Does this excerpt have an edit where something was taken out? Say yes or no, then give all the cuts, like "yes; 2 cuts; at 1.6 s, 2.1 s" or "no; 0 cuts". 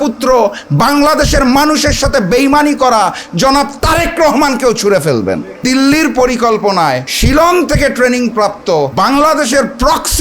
yes; 3 cuts; at 5.6 s, 7.1 s, 8.9 s